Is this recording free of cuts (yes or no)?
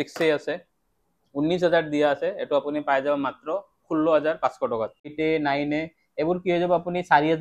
no